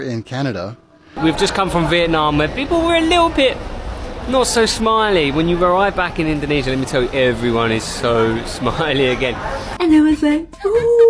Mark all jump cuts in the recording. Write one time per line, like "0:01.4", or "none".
0:01.2
0:09.7